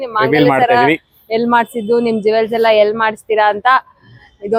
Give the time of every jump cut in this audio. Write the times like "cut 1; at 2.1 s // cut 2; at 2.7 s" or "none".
none